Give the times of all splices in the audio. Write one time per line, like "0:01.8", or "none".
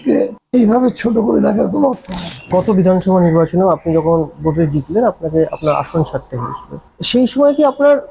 0:02.5
0:06.8